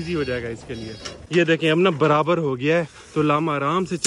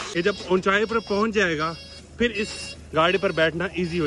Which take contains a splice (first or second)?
first